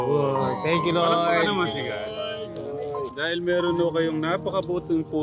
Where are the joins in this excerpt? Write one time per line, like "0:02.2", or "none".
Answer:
0:03.1